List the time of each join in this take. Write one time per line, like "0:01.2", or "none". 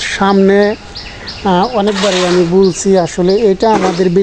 none